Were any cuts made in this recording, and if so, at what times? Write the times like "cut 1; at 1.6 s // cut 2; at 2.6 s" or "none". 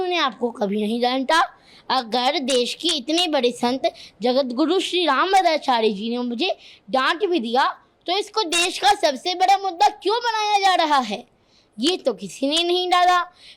none